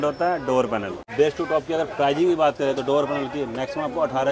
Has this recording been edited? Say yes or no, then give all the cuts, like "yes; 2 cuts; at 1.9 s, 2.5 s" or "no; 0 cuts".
yes; 1 cut; at 1.1 s